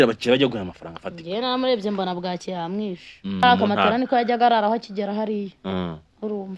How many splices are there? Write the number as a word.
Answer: one